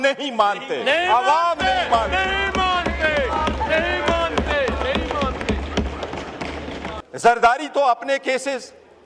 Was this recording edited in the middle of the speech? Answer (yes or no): yes